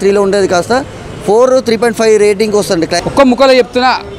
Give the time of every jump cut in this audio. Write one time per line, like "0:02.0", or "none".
0:03.0